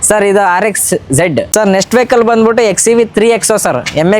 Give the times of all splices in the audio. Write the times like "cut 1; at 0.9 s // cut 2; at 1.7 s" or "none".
cut 1; at 1.5 s